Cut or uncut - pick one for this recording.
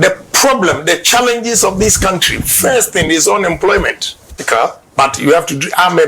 cut